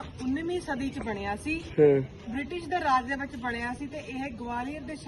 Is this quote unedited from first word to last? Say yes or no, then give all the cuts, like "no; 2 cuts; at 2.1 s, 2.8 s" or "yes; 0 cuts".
yes; 0 cuts